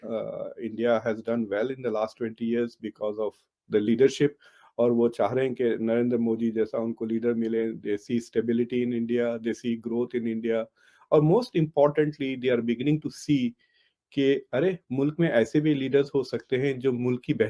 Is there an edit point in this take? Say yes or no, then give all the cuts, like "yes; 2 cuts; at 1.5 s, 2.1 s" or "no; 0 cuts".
no; 0 cuts